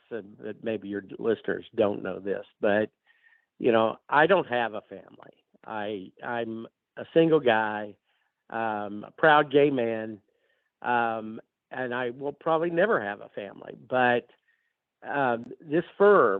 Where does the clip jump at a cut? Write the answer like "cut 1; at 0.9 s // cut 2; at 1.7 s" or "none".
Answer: none